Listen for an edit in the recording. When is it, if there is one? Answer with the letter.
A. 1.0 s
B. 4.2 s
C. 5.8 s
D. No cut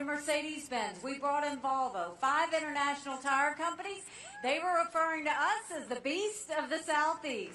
B